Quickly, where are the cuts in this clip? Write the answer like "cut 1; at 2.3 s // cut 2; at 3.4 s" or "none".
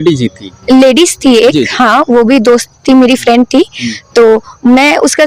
none